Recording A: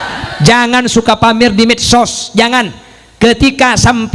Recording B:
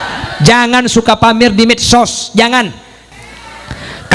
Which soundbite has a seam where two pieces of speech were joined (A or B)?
B